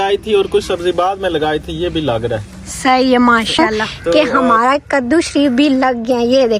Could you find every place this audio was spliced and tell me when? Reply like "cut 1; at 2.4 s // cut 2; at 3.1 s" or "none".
cut 1; at 4.1 s